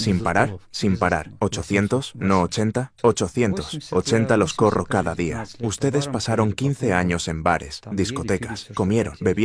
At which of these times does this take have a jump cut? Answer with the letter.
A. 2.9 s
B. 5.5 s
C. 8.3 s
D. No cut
B